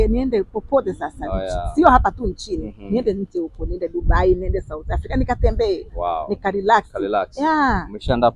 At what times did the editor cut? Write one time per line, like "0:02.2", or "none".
none